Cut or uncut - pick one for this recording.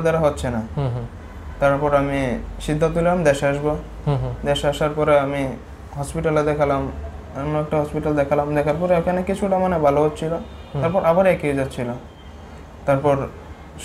uncut